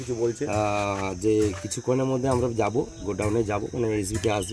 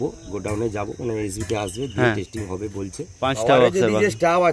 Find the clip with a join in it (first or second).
second